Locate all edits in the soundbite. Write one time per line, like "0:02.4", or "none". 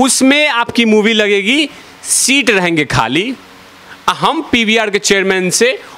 none